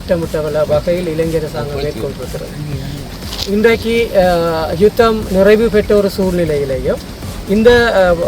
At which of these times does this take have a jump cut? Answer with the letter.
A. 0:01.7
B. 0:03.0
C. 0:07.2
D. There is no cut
B